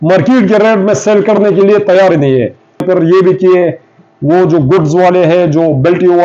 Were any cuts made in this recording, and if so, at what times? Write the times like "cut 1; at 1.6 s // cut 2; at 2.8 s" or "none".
cut 1; at 2.8 s

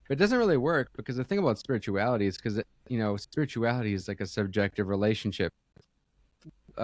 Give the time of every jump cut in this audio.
none

